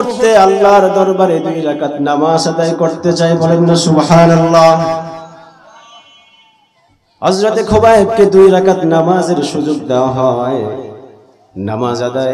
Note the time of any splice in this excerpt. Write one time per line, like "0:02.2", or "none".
none

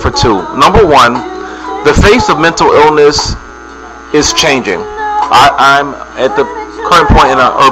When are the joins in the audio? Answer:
0:05.5

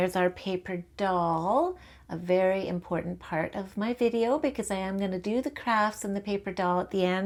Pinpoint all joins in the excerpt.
none

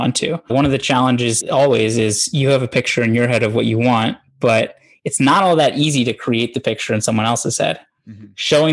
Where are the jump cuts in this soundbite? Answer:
0:01.4

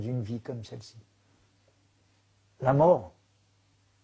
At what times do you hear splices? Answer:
none

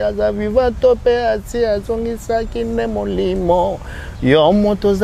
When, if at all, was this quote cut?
none

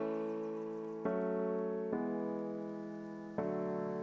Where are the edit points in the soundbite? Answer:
0:02.7

